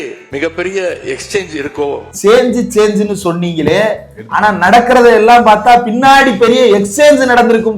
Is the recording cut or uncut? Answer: cut